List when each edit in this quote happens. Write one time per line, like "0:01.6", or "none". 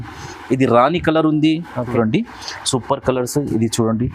0:01.9

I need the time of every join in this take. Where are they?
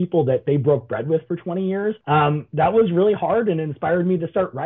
0:02.0

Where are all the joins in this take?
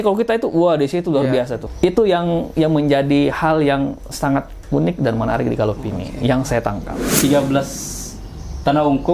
0:01.6
0:07.2

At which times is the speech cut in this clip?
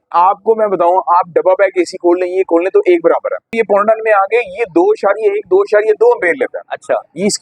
0:03.5

